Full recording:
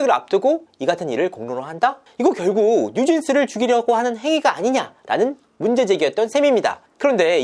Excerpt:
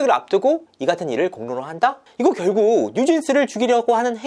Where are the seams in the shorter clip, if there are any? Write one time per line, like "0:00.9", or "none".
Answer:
none